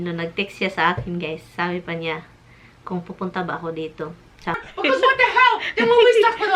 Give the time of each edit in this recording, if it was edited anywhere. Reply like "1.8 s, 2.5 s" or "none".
4.7 s

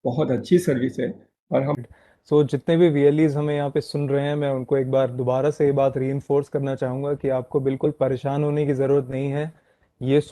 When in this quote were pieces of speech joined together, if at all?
1.8 s

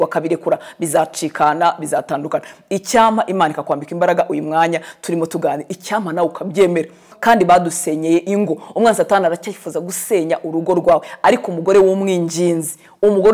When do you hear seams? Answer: 7.1 s

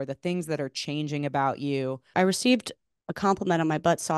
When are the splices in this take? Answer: 2.1 s

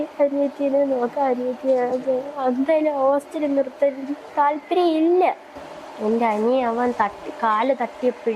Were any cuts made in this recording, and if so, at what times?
5.5 s

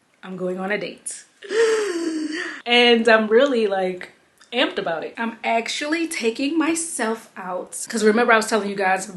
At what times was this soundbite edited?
none

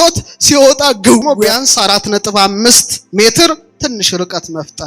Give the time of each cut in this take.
1.3 s

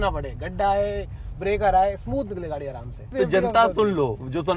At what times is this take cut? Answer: 3.1 s

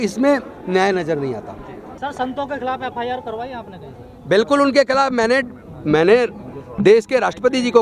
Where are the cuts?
2.0 s

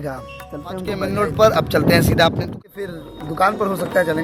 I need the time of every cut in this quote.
1.0 s, 2.5 s

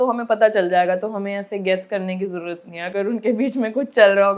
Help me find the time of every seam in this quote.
none

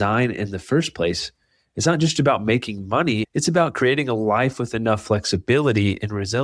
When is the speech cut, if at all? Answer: 3.2 s

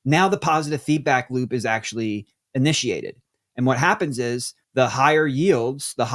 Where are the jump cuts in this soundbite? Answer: 4.6 s

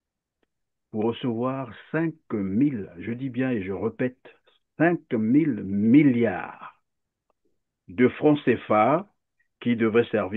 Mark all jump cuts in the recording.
none

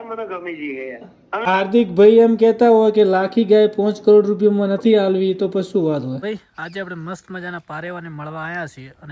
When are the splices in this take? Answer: 6.2 s

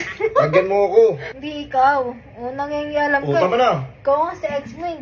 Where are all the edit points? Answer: 1.3 s

